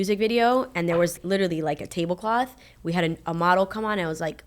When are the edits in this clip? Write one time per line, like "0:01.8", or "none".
0:01.2